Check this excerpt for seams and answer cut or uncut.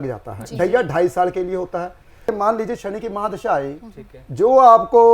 cut